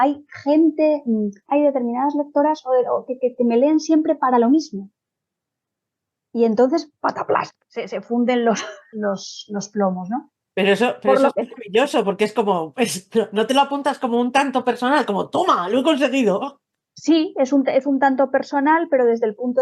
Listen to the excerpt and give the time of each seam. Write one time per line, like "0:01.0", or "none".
0:01.5
0:08.8